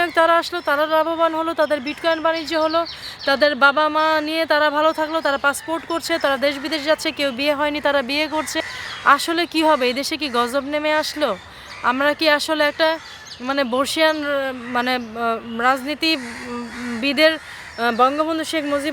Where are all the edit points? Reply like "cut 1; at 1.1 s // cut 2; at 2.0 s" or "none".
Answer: cut 1; at 8.6 s

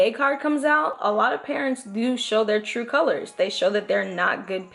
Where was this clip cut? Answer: none

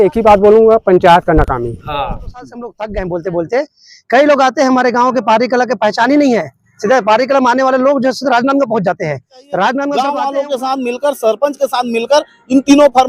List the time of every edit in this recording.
cut 1; at 2.8 s // cut 2; at 9.9 s

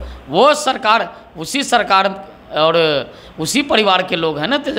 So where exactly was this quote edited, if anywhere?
none

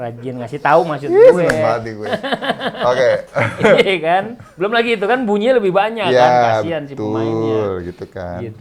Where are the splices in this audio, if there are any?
none

